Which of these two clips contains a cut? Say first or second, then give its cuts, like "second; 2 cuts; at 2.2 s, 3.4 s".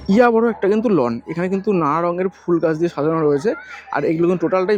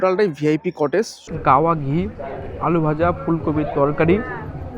second; 1 cut; at 1.2 s